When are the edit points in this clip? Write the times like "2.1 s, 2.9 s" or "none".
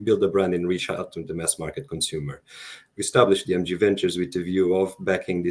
3.0 s